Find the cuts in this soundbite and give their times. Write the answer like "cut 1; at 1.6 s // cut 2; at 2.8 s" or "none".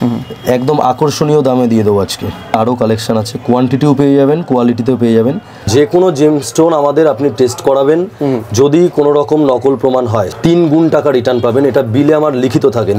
cut 1; at 2.5 s // cut 2; at 5.6 s // cut 3; at 10.3 s

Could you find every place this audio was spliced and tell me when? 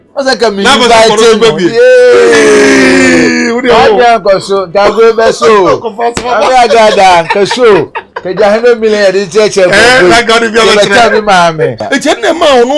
cut 1; at 11.8 s

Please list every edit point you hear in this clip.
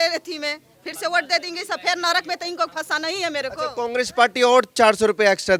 none

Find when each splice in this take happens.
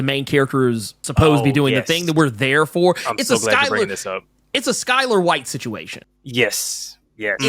cut 1; at 1.0 s

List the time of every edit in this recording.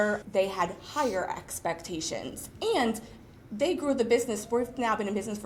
none

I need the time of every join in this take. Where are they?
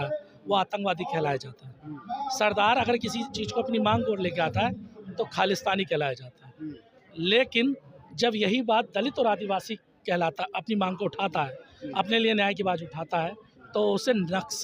none

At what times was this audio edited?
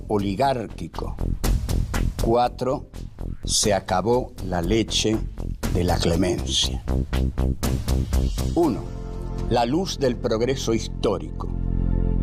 cut 1; at 2.8 s

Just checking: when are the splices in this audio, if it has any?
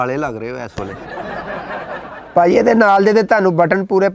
cut 1; at 2.2 s

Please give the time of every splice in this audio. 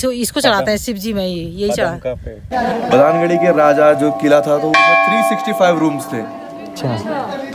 cut 1; at 2.5 s

